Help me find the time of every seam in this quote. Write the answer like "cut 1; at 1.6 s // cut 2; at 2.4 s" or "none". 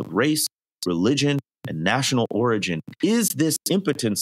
cut 1; at 2.8 s

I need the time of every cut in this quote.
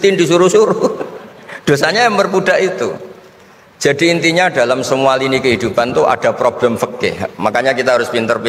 none

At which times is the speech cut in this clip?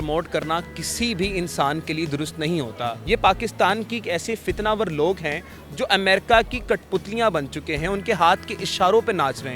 cut 1; at 2.9 s

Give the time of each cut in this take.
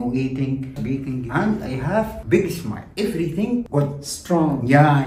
cut 1; at 0.9 s

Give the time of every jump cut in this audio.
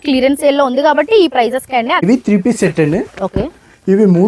cut 1; at 2.0 s

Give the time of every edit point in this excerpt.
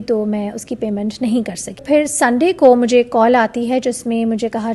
cut 1; at 1.8 s

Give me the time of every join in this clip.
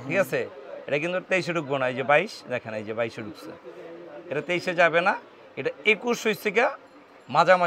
none

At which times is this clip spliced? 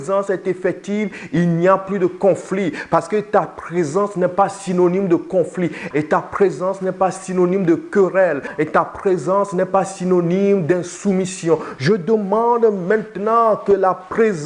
cut 1; at 5.8 s // cut 2; at 8.5 s

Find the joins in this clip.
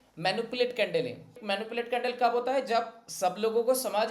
cut 1; at 1.4 s

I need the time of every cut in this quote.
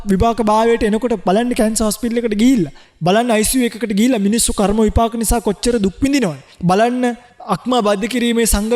cut 1; at 2.8 s // cut 2; at 6.5 s // cut 3; at 7.3 s

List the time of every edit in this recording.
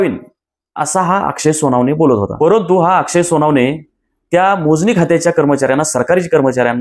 cut 1; at 2.3 s

